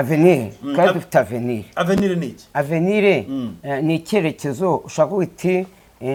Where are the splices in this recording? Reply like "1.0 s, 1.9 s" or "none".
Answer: none